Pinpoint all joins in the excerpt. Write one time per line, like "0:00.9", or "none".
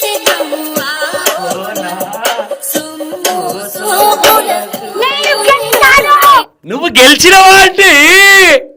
none